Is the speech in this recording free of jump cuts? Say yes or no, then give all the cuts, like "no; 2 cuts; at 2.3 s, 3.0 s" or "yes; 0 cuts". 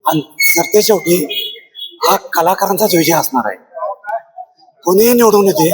yes; 0 cuts